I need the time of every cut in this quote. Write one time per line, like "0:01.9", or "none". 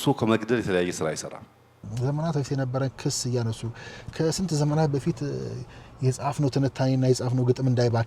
0:01.8